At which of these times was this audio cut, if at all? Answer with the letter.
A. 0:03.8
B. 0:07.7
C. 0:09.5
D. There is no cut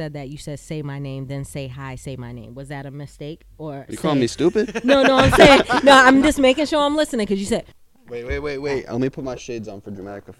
B